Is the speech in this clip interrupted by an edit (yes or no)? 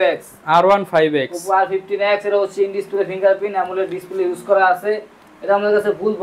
no